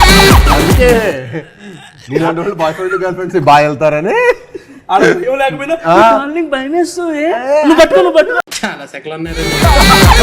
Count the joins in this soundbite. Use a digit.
1